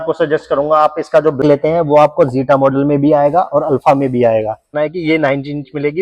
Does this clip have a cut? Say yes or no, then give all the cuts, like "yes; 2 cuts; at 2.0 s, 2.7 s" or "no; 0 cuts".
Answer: yes; 2 cuts; at 1.4 s, 4.6 s